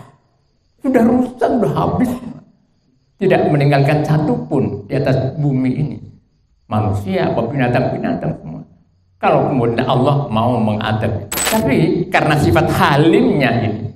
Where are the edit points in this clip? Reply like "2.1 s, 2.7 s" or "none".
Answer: 11.3 s